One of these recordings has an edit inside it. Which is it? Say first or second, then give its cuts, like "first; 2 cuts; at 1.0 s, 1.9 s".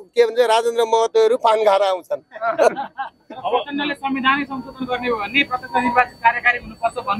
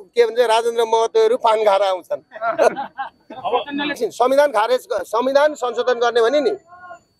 second; 1 cut; at 4.0 s